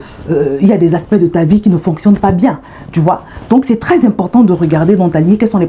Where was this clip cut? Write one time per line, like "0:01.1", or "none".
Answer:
none